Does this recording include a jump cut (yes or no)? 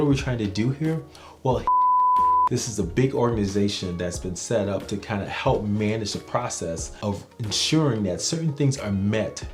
no